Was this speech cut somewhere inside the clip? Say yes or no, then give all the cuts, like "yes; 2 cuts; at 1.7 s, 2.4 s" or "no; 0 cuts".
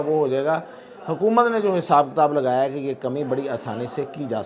no; 0 cuts